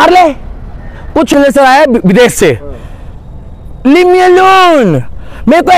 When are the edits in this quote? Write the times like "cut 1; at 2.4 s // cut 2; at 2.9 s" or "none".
cut 1; at 1.3 s